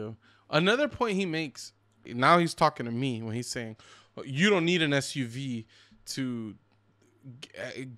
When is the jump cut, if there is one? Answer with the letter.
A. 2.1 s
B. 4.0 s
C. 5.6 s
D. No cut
A